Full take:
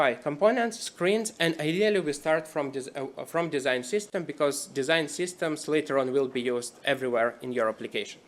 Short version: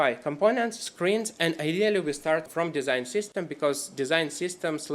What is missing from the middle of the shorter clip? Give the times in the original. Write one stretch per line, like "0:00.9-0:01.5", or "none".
0:02.5-0:03.2